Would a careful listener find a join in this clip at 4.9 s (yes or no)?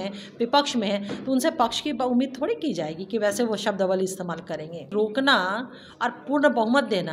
yes